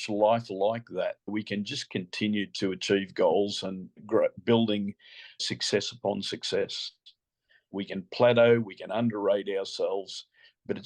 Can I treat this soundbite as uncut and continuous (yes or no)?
no